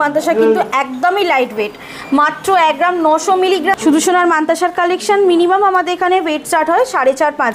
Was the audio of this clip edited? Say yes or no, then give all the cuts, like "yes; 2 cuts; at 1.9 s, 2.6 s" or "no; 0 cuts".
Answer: yes; 1 cut; at 3.8 s